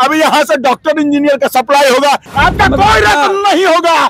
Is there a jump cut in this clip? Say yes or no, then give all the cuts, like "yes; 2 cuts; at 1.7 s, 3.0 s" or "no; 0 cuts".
yes; 1 cut; at 2.3 s